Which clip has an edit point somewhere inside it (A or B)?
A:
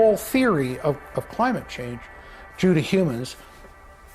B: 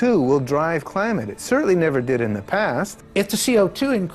B